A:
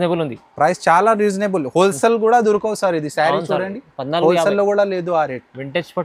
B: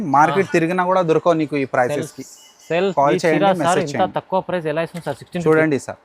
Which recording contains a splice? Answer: B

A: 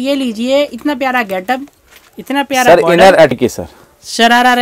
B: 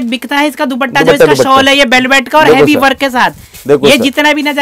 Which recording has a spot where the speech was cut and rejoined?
A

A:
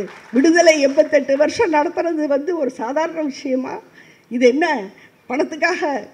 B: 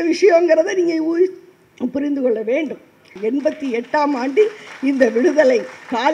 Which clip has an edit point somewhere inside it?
B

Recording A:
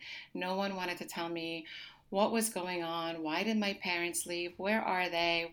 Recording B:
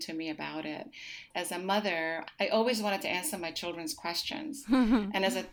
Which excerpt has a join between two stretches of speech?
B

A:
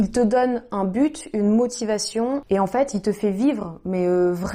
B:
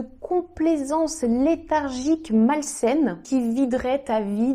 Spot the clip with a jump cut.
B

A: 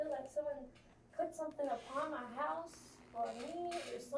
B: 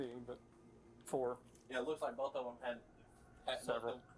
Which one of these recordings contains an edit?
B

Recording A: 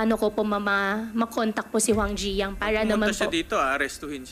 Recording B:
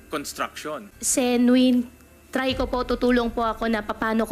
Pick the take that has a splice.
B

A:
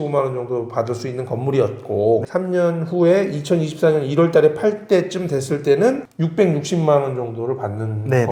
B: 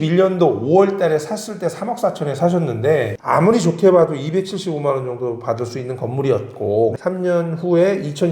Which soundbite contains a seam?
B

